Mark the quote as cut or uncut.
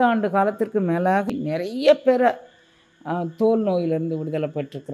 cut